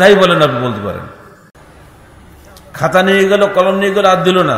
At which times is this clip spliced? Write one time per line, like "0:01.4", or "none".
none